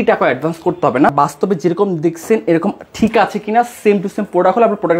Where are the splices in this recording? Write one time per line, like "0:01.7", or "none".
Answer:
0:01.1